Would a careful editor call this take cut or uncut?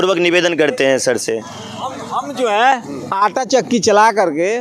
uncut